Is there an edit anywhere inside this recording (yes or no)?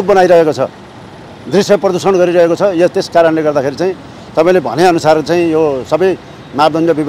no